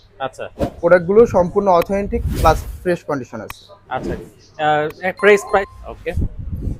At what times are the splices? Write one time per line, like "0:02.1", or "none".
0:05.7